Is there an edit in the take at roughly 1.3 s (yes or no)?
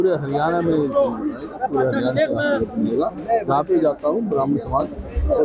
no